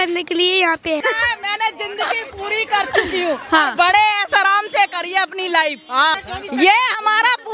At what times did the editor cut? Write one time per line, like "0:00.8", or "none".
0:01.0
0:06.2